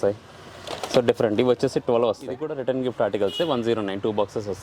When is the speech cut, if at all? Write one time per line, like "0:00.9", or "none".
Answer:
0:02.5